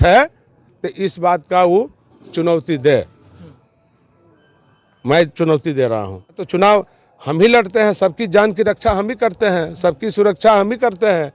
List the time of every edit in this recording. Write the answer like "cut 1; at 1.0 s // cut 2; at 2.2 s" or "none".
cut 1; at 6.4 s